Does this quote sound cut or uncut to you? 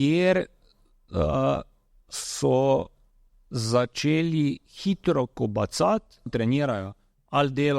cut